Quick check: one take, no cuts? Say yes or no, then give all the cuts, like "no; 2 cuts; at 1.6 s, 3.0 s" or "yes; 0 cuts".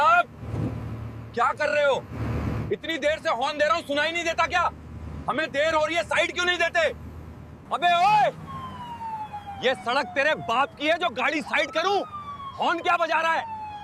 yes; 0 cuts